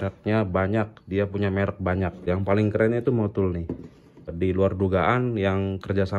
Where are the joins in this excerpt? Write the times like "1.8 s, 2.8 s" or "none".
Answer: 2.2 s, 4.3 s